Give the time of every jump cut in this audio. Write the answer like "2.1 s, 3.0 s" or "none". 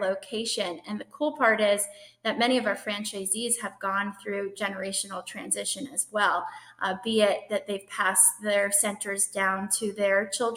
none